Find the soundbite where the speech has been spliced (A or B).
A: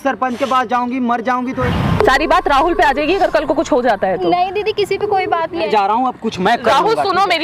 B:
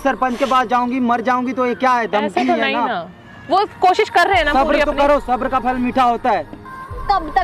A